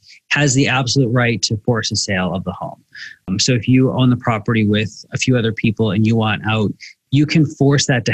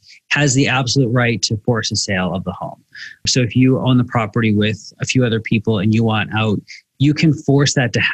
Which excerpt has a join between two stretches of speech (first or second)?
second